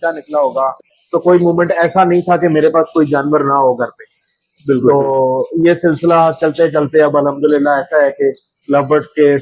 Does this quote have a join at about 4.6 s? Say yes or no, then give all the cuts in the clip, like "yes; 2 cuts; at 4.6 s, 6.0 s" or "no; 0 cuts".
no; 1 cut; at 1.0 s